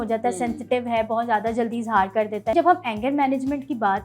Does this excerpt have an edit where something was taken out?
yes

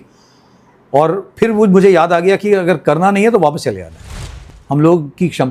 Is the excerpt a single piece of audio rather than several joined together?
no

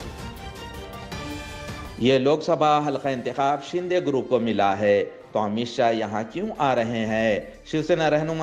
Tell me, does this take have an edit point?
no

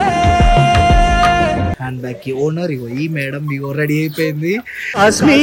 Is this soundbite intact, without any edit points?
no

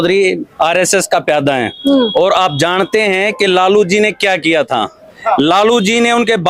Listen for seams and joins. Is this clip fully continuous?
yes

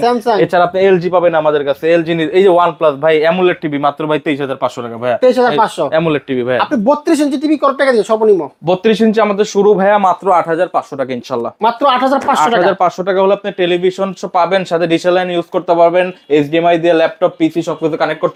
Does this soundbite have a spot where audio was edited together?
no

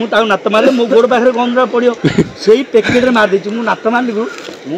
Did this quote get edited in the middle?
no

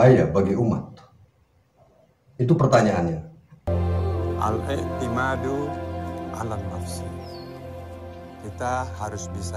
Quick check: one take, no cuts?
no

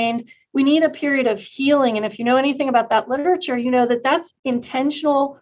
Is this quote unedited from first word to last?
no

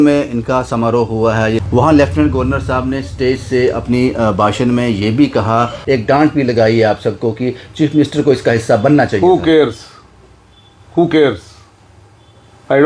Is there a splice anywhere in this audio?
yes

